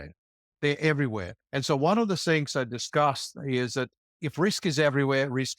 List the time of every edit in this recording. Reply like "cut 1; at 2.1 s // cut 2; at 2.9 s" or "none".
cut 1; at 4.2 s